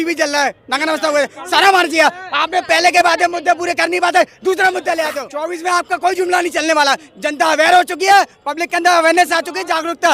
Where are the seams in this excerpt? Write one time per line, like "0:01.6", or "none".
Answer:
0:05.3